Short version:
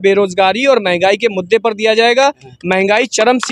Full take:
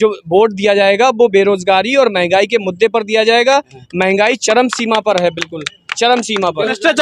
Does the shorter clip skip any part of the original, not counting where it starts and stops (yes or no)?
no